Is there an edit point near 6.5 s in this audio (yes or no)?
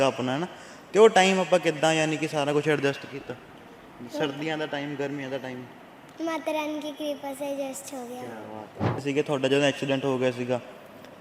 no